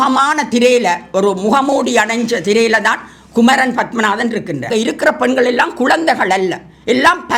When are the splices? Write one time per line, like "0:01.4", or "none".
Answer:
0:04.7